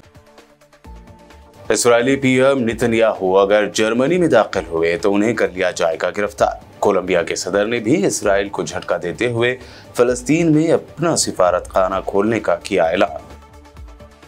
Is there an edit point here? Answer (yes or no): yes